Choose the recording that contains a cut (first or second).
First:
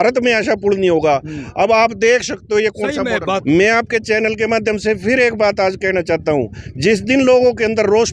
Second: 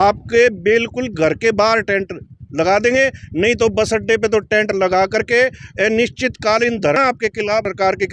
first